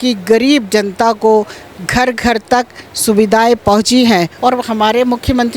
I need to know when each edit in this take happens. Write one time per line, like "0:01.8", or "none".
0:04.3